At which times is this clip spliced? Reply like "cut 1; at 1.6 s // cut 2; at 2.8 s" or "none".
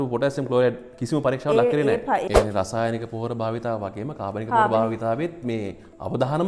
cut 1; at 2.3 s